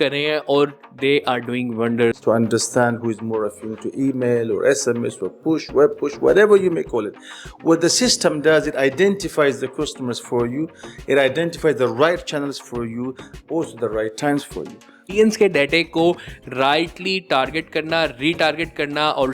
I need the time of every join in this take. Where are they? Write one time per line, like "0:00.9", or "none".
0:02.2
0:15.1